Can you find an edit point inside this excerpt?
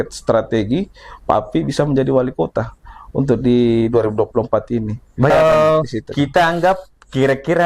yes; 1 cut; at 5.3 s

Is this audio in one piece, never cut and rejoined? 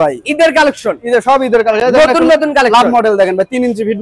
yes; 0 cuts

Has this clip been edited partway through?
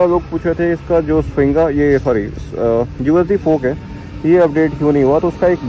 no; 0 cuts

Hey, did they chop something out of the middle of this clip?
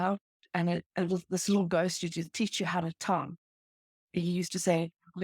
yes; 1 cut; at 4.0 s

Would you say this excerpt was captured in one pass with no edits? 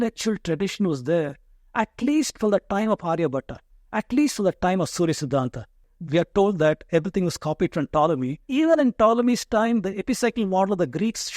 no; 2 cuts; at 5.8 s, 8.5 s

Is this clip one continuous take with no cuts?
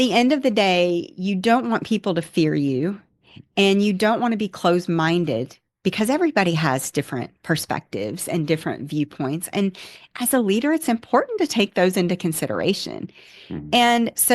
yes; 0 cuts

